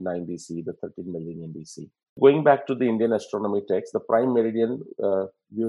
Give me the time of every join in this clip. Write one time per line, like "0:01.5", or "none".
0:02.1